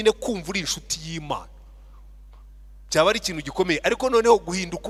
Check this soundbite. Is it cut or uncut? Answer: uncut